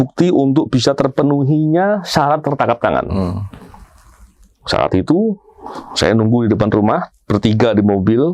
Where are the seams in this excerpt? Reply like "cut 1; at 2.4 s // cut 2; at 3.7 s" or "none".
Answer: none